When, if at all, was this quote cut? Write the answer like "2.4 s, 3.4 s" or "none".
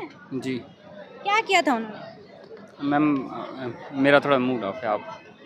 none